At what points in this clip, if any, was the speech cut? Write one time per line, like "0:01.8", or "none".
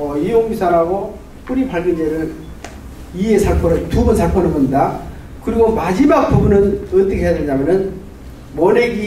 none